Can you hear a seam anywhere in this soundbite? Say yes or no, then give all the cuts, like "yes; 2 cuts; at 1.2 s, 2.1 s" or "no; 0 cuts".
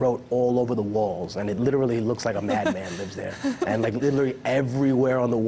yes; 1 cut; at 3.3 s